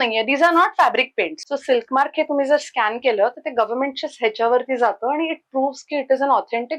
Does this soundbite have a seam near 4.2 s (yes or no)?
no